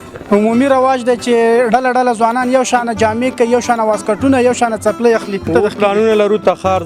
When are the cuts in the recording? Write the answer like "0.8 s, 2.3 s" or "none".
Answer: 5.5 s